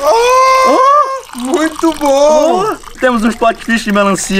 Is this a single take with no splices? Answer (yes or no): no